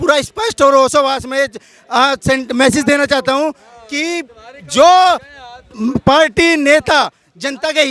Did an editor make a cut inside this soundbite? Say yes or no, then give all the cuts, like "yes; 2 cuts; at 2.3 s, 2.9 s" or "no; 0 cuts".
no; 0 cuts